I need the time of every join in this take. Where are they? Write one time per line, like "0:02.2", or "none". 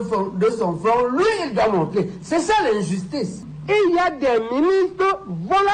0:03.4